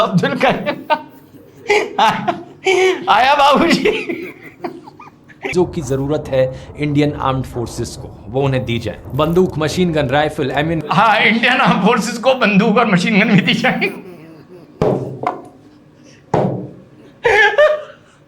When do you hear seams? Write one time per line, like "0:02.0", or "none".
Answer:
0:05.5